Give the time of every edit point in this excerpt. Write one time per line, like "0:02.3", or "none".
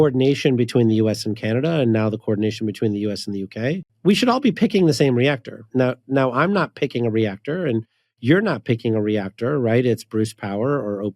0:03.9
0:05.6